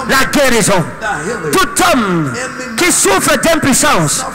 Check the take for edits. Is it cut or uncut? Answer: uncut